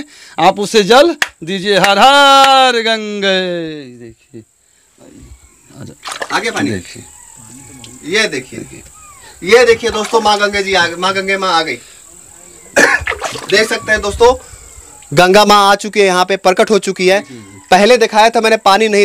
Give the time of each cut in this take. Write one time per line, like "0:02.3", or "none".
none